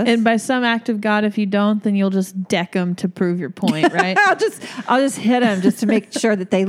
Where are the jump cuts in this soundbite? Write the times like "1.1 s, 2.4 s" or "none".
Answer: none

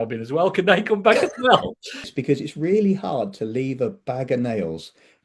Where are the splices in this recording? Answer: 2.1 s

